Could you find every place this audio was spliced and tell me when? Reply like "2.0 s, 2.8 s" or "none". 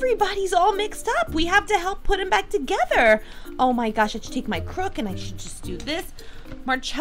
none